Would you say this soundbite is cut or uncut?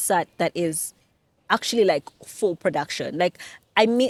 uncut